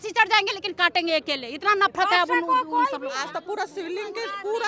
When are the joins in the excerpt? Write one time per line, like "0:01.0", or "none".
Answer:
0:03.1